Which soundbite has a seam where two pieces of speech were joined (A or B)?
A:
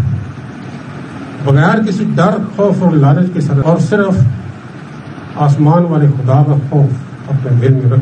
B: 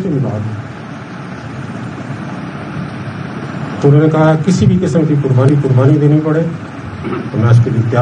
A